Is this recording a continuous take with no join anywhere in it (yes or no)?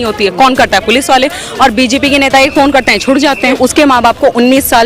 no